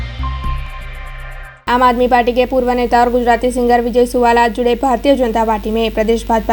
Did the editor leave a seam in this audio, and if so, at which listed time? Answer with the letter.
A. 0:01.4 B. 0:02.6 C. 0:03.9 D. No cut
A